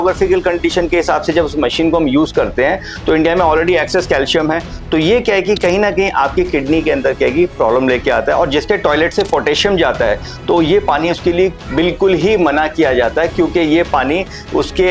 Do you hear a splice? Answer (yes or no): no